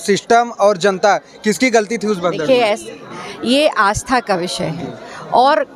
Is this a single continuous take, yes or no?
yes